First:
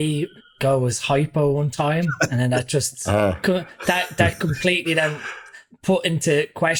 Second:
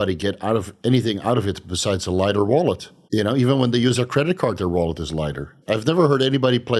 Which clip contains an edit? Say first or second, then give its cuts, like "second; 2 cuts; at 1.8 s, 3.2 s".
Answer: second; 2 cuts; at 2.9 s, 5.5 s